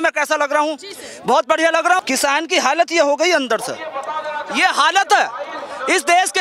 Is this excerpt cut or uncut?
cut